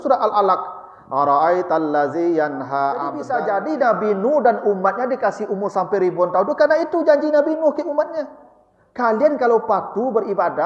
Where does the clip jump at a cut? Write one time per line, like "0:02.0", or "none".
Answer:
0:03.3